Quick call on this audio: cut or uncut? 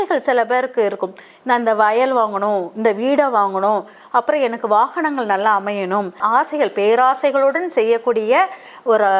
cut